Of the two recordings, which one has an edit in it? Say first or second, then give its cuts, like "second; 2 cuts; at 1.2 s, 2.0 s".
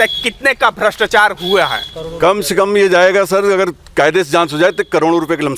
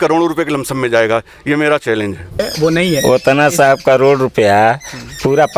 second; 1 cut; at 2.4 s